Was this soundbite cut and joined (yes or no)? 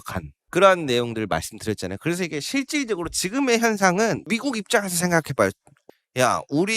yes